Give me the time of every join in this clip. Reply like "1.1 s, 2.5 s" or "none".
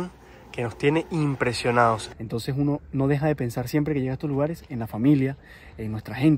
2.1 s